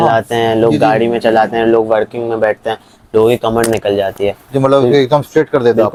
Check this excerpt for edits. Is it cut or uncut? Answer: uncut